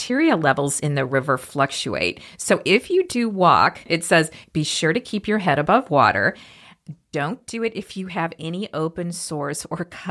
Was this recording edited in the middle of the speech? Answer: yes; 1 cut; at 3.9 s

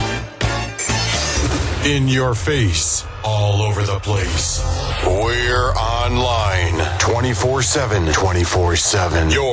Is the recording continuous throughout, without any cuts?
no; 1 cut; at 1.3 s

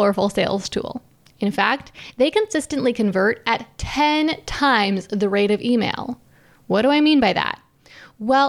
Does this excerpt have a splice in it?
no; 0 cuts

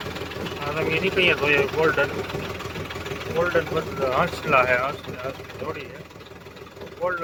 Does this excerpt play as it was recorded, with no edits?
yes; 0 cuts

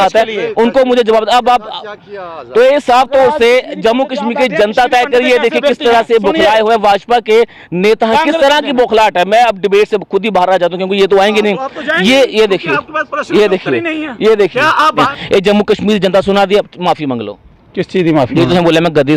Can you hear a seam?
yes; 1 cut; at 15.1 s

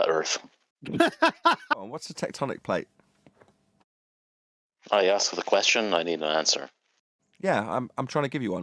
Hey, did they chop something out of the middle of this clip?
yes; 1 cut; at 2.0 s

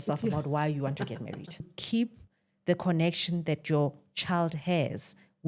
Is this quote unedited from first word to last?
no; 1 cut; at 1.7 s

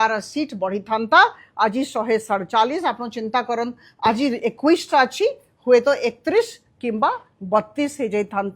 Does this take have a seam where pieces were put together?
no; 0 cuts

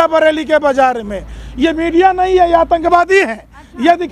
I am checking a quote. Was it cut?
no; 0 cuts

